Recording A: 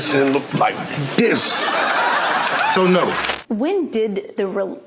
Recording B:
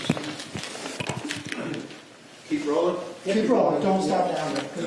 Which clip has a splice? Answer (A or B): A